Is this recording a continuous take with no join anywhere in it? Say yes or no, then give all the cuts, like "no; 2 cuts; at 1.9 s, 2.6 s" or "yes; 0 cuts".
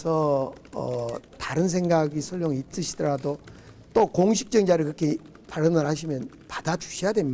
yes; 0 cuts